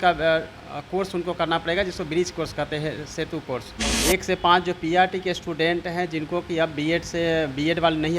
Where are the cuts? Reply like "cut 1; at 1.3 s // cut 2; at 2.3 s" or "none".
cut 1; at 3.9 s